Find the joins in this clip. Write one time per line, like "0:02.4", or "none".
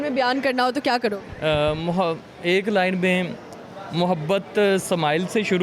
none